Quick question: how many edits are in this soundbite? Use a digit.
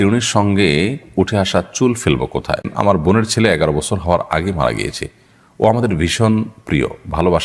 1